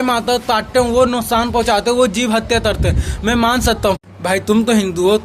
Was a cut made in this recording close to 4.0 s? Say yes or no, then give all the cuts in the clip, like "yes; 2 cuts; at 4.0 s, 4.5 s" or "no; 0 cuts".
yes; 1 cut; at 4.0 s